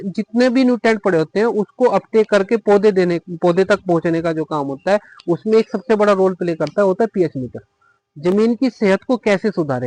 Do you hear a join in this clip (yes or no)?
no